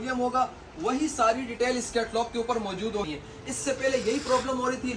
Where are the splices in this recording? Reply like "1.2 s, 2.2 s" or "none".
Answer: 3.1 s